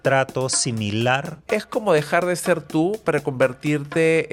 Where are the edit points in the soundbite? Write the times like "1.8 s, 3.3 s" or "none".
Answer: 1.3 s